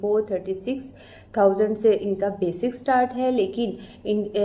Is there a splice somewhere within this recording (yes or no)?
no